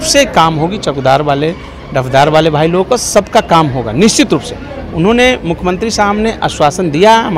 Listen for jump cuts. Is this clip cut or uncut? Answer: uncut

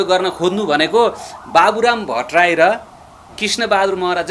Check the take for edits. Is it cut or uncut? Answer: uncut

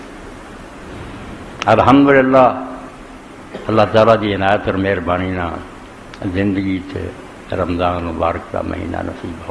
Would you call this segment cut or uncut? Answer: cut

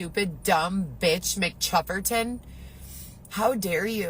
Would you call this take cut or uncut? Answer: cut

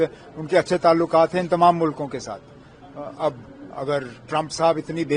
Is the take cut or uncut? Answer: uncut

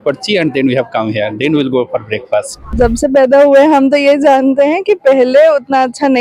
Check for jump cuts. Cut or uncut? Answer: cut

